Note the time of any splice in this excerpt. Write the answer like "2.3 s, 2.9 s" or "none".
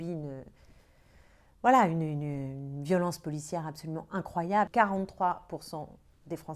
4.7 s

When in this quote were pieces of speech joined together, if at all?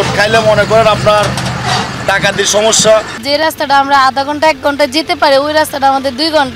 3.2 s

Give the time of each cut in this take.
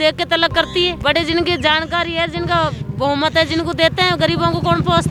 none

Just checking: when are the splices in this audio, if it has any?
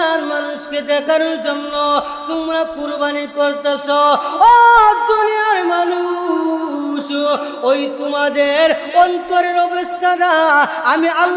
none

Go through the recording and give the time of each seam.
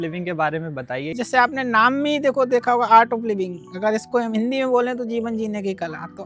1.1 s

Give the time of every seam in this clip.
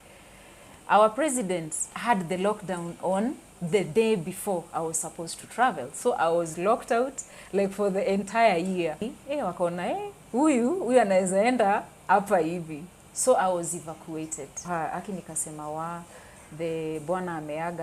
1.9 s, 9.1 s, 14.7 s

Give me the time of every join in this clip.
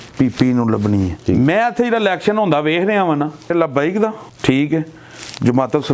1.1 s, 3.5 s

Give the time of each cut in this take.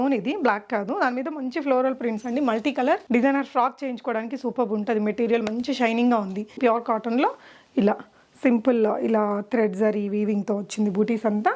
3.0 s, 6.6 s

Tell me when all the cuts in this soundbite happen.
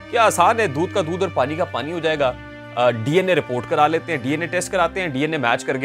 none

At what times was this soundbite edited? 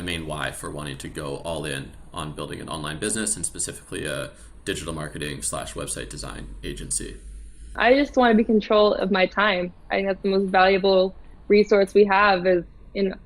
7.7 s

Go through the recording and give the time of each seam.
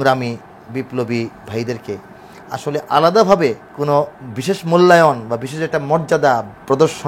3.7 s

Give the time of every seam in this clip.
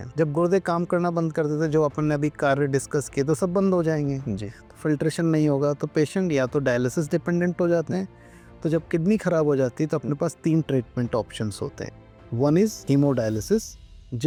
none

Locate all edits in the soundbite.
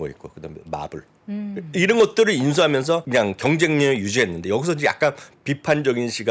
3.0 s

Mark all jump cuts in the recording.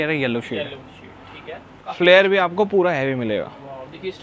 1.8 s

